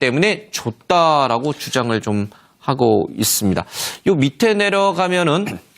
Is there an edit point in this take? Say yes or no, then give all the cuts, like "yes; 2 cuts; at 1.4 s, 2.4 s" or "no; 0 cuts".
yes; 1 cut; at 3.3 s